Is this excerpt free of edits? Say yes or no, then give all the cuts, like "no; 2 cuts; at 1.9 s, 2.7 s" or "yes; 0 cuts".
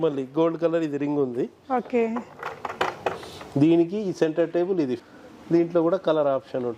no; 1 cut; at 5.0 s